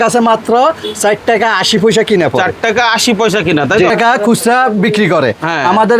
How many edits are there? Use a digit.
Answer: 1